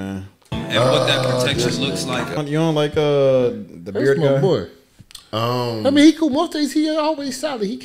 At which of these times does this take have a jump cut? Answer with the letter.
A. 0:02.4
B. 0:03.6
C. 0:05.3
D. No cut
A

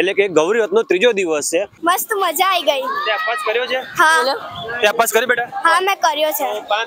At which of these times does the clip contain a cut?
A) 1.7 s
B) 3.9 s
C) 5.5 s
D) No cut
A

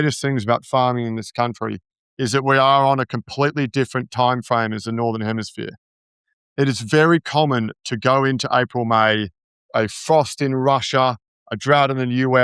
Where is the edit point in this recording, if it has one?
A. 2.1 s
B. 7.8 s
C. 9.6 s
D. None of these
C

